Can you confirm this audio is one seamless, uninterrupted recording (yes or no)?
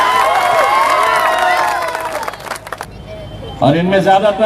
no